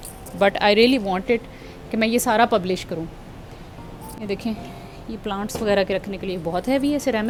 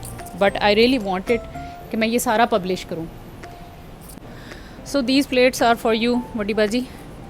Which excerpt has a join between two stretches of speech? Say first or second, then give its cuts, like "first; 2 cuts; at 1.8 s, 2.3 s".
second; 1 cut; at 4.2 s